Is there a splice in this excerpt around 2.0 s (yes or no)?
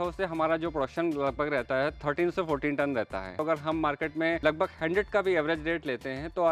no